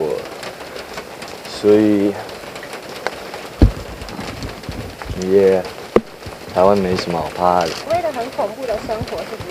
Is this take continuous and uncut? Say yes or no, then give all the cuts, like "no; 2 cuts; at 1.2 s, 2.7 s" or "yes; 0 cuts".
no; 1 cut; at 7.9 s